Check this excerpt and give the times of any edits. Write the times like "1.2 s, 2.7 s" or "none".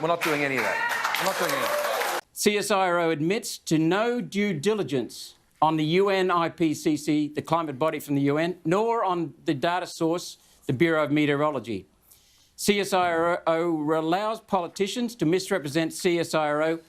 2.3 s